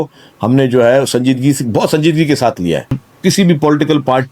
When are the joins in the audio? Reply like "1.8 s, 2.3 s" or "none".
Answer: 3.1 s